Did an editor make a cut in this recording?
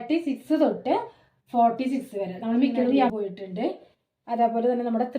yes; 1 cut; at 3.1 s

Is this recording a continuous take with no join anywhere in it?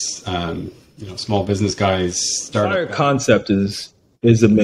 no; 1 cut; at 2.8 s

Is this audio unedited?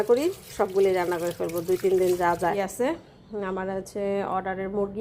no; 1 cut; at 2.5 s

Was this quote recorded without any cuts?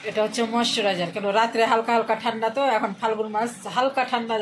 yes; 0 cuts

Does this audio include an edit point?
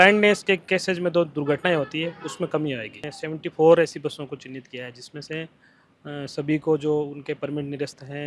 yes; 1 cut; at 3.1 s

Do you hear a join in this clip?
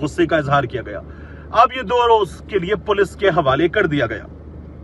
no; 0 cuts

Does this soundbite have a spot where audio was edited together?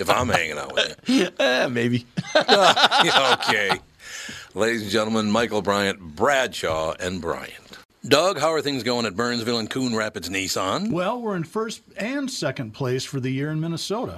yes; 1 cut; at 7.8 s

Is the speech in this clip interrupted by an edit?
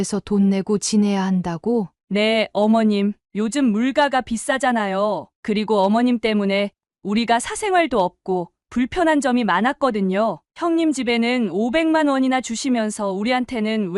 no; 0 cuts

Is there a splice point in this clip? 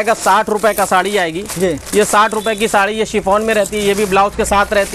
no; 0 cuts

